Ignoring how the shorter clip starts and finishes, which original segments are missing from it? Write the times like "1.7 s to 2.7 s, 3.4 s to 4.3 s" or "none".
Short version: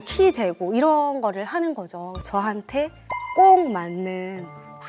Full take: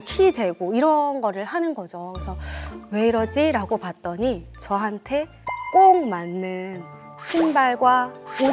2.2 s to 4.5 s

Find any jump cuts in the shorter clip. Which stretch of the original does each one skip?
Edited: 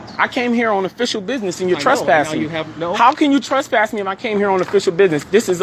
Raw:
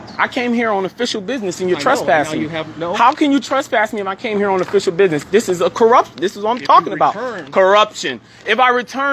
none

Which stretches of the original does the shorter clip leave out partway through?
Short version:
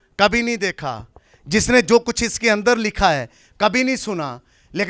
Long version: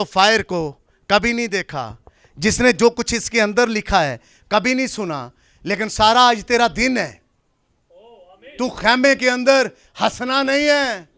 none

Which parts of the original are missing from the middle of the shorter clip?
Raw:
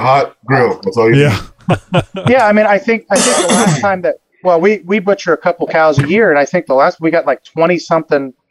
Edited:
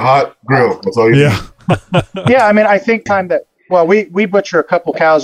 3.0 s to 3.8 s

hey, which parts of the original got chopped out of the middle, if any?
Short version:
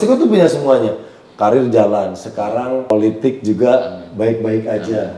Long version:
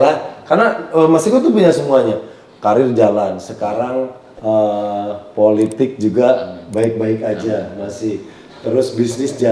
4.1 s to 5.5 s

